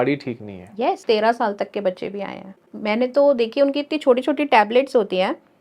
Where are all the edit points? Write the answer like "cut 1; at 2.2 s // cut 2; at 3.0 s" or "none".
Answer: cut 1; at 1.0 s // cut 2; at 2.7 s